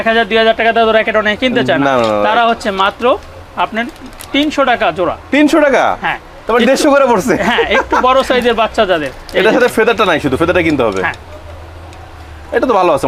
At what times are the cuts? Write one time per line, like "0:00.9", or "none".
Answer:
none